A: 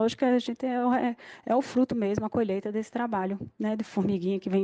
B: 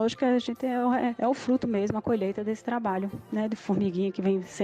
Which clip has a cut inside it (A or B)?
B